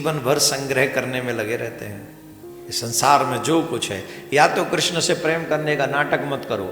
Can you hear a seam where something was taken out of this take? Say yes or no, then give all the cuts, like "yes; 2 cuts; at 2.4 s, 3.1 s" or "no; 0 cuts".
yes; 1 cut; at 2.5 s